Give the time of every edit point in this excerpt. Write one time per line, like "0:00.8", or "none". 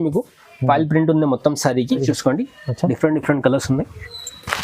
0:02.0